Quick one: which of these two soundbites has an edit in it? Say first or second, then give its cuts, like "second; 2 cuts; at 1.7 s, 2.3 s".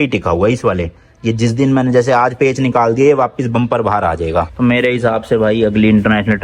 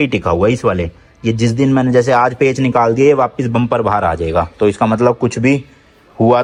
first; 1 cut; at 4.5 s